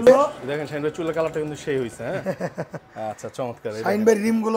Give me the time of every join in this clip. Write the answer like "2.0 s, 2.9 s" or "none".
none